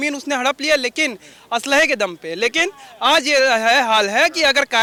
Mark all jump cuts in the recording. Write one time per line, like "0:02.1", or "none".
none